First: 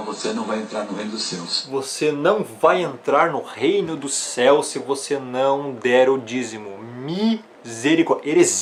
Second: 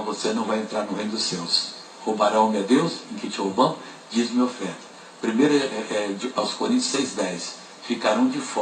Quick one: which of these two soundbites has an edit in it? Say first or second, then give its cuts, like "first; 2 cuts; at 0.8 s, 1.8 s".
second; 1 cut; at 1.6 s